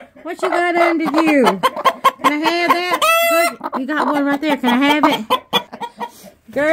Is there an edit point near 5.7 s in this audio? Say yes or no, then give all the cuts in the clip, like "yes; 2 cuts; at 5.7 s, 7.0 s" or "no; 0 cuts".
yes; 1 cut; at 5.7 s